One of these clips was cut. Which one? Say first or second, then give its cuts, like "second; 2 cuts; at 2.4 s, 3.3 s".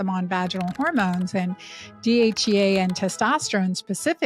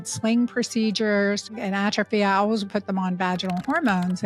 second; 1 cut; at 1.6 s